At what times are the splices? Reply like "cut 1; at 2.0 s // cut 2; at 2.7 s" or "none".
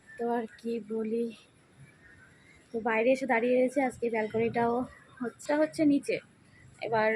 cut 1; at 5.4 s